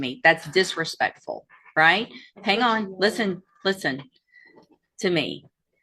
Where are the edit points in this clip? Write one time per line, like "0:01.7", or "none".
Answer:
none